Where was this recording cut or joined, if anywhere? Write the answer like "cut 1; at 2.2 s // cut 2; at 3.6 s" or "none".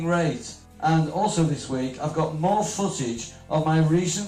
none